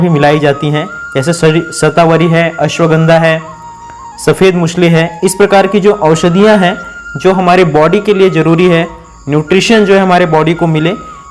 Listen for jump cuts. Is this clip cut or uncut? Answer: uncut